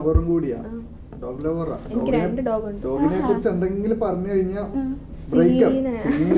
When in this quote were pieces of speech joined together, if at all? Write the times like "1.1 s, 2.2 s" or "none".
none

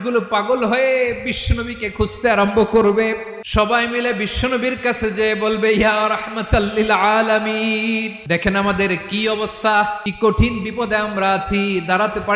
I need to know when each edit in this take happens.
3.4 s, 8.2 s, 10.0 s

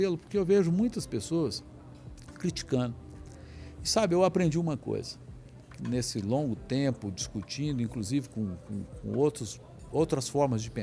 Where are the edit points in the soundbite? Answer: none

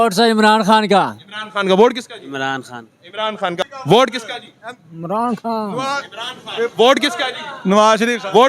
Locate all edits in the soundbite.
3.6 s

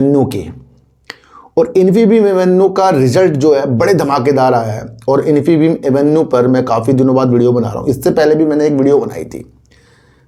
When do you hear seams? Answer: none

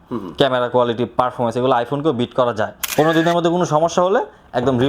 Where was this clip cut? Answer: 2.8 s

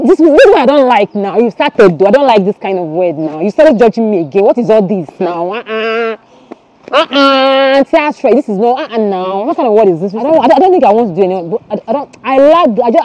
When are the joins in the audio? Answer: 10.2 s

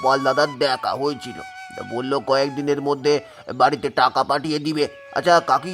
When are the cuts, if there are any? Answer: none

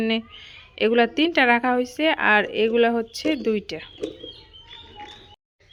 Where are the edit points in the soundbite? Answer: none

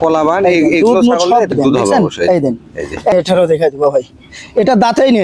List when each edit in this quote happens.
1.5 s, 3.1 s

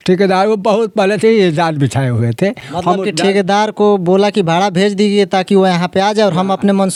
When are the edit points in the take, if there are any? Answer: none

